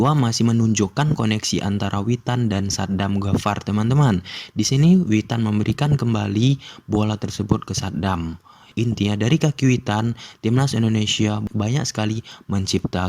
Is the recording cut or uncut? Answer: uncut